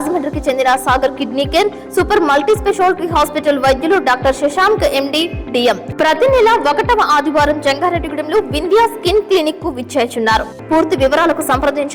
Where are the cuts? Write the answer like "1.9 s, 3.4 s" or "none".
5.9 s, 10.5 s

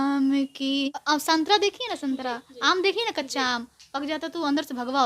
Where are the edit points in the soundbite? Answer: 1.0 s

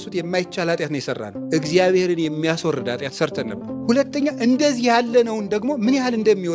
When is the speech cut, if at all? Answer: 1.3 s, 3.8 s

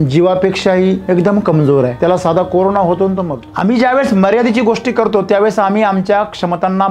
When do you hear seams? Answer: 1.0 s, 1.9 s, 3.4 s

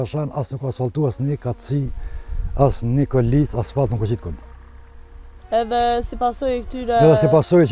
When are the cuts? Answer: none

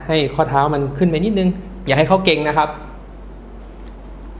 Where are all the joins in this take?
none

